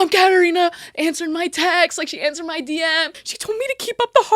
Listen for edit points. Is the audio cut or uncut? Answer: cut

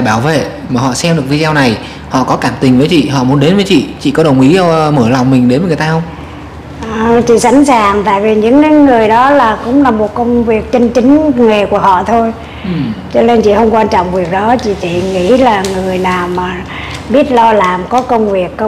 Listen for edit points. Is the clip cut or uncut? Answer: uncut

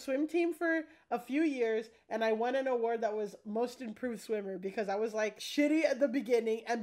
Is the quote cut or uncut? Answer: cut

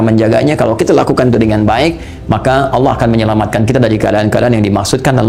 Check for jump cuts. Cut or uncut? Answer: uncut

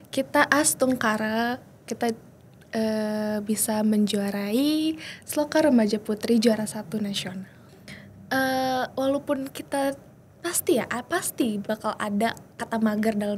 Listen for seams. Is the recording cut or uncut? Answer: cut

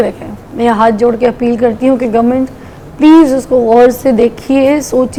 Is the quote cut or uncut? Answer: uncut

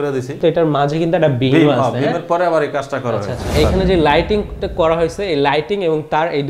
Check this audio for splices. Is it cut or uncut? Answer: cut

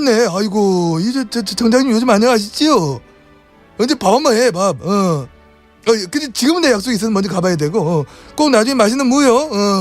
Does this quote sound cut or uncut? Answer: cut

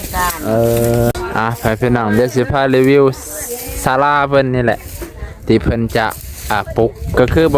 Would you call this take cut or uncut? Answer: cut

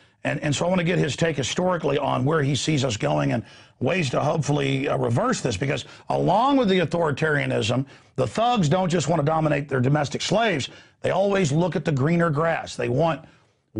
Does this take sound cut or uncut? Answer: cut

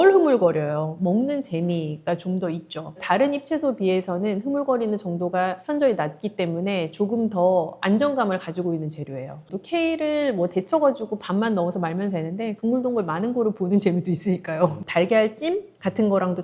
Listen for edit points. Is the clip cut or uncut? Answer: cut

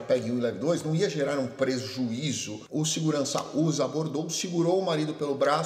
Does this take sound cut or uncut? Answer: cut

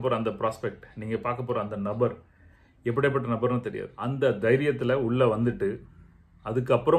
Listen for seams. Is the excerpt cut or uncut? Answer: cut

